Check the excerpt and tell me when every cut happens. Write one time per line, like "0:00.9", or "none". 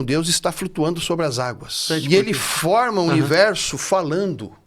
0:01.8